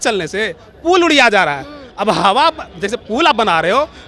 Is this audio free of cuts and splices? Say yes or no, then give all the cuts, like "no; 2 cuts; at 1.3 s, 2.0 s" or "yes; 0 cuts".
yes; 0 cuts